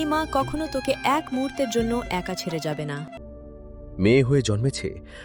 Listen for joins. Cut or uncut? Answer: cut